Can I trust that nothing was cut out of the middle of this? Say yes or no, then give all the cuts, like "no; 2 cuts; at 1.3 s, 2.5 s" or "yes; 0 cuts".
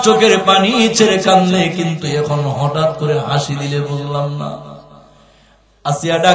yes; 0 cuts